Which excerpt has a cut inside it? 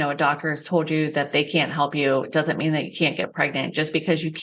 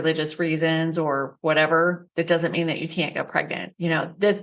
second; 3 cuts; at 1.3 s, 2.0 s, 3.4 s

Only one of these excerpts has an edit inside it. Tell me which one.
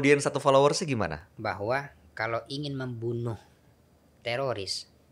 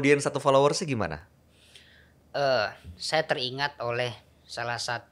first; 1 cut; at 1.3 s

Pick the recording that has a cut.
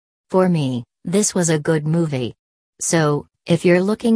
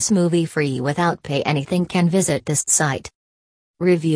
second; 1 cut; at 1.7 s

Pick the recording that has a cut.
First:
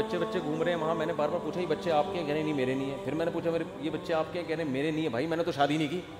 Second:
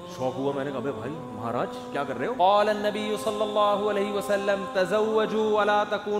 second; 1 cut; at 2.4 s

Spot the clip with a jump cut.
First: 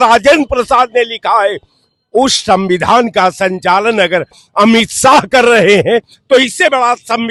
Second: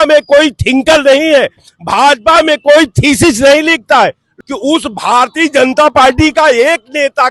second; 1 cut; at 4.3 s

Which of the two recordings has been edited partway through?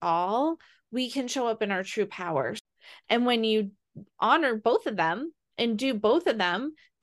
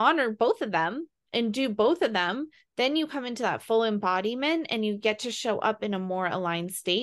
first; 1 cut; at 2.6 s

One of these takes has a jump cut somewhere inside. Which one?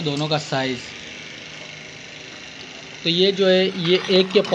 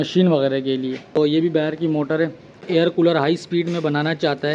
second; 2 cuts; at 1.2 s, 2.9 s

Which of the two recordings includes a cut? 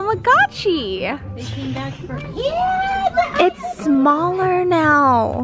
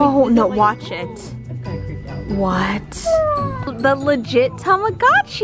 second; 1 cut; at 3.6 s

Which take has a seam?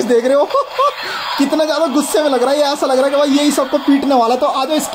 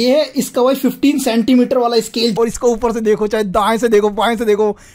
second; 1 cut; at 2.4 s

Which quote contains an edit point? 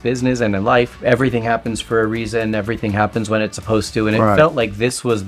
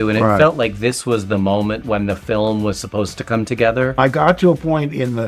second; 1 cut; at 4.0 s

